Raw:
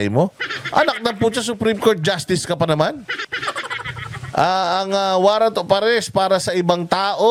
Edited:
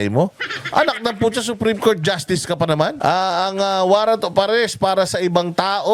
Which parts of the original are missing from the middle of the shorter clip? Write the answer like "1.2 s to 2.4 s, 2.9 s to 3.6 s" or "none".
3.0 s to 4.3 s